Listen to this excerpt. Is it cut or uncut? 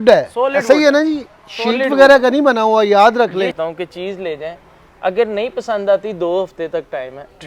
cut